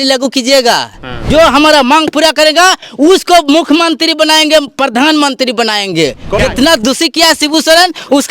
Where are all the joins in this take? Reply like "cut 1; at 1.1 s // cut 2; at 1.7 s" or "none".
cut 1; at 1.2 s // cut 2; at 6.4 s